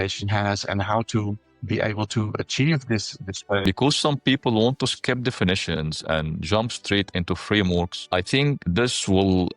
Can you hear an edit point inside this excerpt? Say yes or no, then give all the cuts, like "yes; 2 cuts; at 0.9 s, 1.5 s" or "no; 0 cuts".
yes; 1 cut; at 3.7 s